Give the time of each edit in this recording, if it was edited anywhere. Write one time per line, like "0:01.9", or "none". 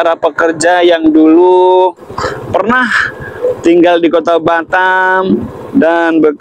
none